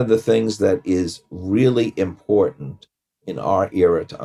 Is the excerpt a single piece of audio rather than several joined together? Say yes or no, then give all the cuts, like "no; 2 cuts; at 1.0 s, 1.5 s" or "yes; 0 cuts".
yes; 0 cuts